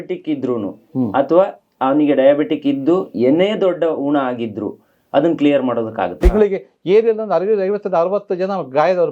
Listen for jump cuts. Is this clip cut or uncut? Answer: cut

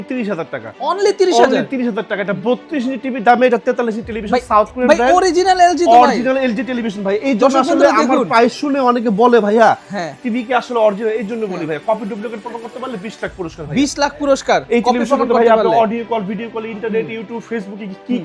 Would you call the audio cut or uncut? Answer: uncut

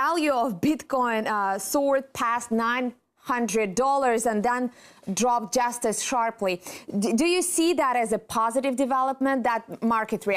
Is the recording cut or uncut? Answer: cut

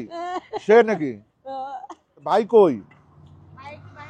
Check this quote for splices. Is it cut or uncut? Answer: cut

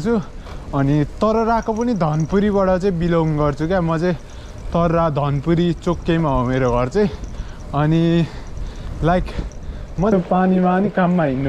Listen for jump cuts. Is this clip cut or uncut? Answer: cut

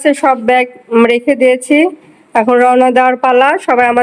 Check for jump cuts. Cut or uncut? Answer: uncut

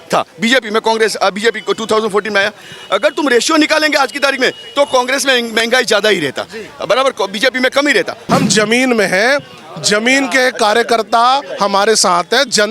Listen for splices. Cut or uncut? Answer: cut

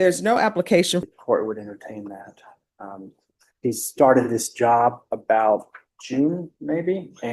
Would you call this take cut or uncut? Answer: cut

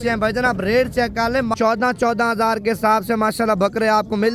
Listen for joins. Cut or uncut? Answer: cut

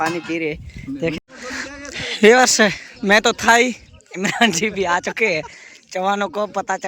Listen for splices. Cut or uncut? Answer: cut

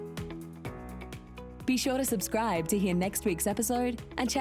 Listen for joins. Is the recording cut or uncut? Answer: cut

